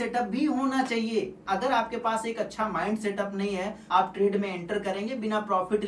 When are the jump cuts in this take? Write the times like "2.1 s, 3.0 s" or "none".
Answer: 1.4 s, 3.8 s